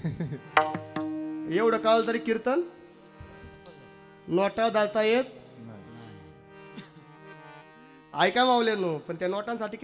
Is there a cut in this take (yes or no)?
no